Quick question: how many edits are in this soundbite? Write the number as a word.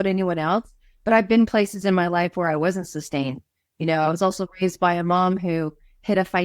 zero